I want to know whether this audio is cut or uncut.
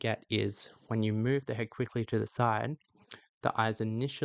uncut